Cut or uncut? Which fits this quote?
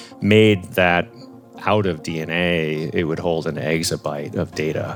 uncut